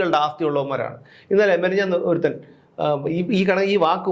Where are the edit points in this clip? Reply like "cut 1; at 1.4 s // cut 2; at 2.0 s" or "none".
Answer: none